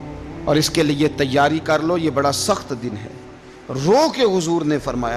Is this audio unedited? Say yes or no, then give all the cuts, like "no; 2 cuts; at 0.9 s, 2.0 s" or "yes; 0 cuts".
yes; 0 cuts